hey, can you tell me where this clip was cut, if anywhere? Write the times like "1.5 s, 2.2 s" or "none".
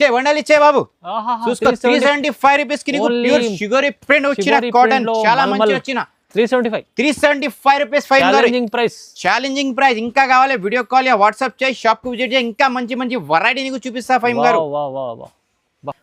none